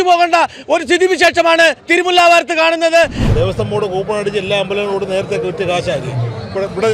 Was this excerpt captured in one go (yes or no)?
no